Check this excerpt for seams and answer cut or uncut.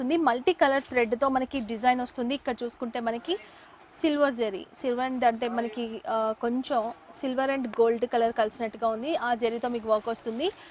uncut